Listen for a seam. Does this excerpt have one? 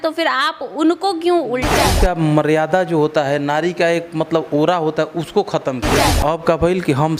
yes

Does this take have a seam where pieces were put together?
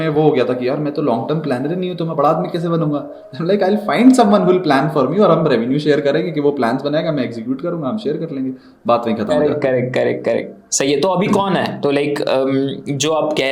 no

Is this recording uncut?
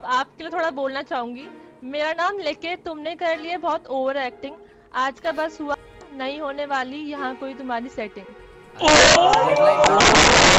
yes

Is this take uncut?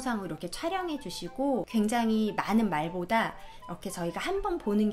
no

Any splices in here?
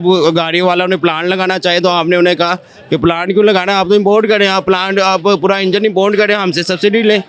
no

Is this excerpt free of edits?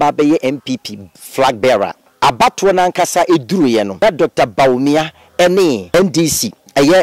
no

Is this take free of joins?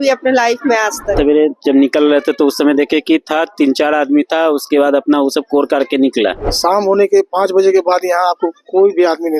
no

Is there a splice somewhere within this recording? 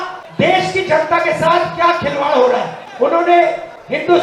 yes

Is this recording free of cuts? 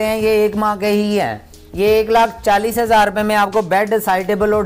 yes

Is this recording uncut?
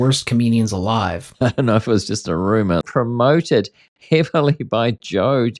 no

